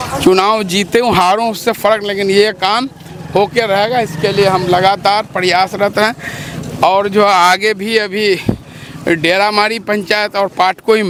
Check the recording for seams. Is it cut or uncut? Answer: uncut